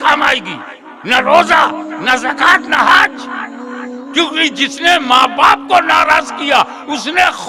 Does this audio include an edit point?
no; 0 cuts

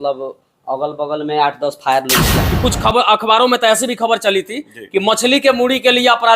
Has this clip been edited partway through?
yes; 1 cut; at 2.3 s

